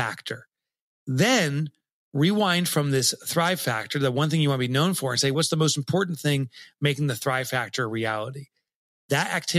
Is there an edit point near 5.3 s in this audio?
yes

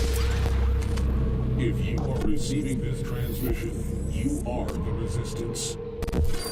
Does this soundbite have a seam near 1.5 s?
no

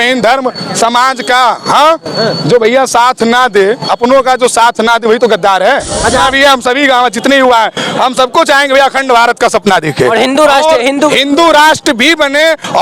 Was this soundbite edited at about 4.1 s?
no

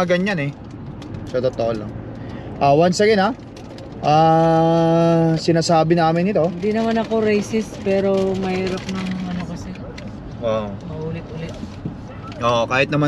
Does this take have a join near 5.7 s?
no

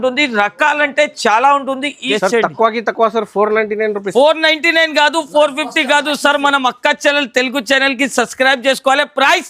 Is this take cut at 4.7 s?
no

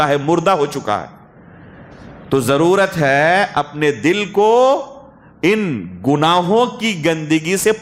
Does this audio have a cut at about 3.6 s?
no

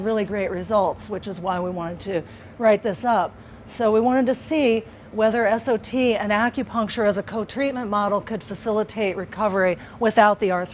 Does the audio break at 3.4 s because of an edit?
yes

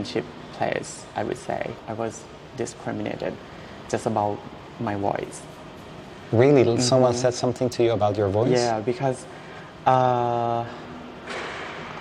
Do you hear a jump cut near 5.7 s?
no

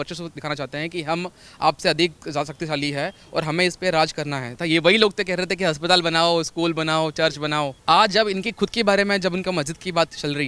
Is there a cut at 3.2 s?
no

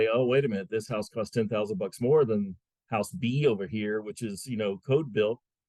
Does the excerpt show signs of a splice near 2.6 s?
no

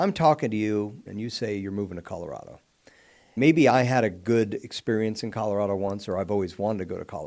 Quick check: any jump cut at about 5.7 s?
no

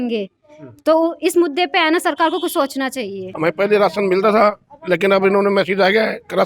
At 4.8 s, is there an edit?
no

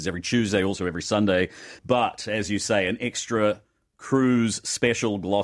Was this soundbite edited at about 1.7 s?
yes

